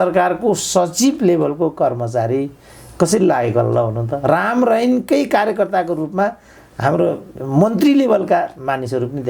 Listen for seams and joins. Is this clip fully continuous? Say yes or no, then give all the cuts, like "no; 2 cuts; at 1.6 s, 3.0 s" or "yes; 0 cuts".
yes; 0 cuts